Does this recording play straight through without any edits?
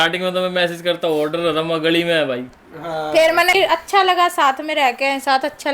no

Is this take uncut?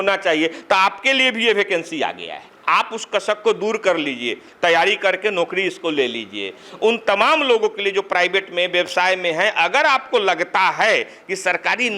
yes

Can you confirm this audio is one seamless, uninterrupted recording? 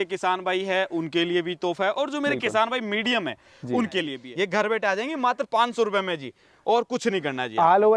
no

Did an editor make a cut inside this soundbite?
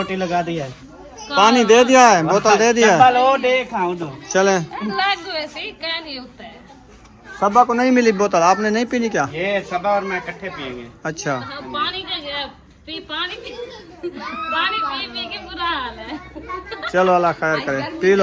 no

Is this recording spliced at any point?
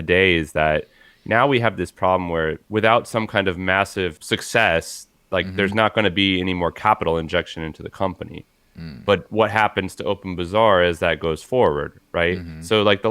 yes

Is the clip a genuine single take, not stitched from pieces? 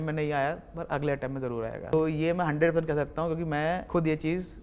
no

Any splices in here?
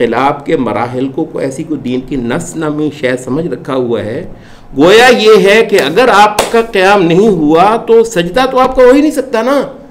no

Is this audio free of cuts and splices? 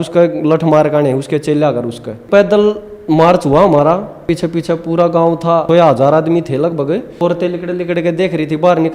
no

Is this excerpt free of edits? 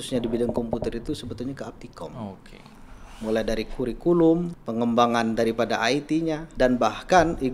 no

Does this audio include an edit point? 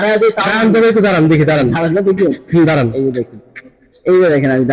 no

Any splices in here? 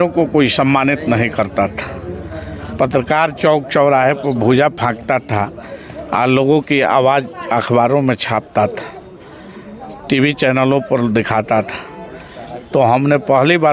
no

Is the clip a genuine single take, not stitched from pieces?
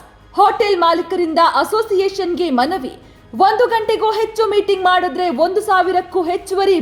yes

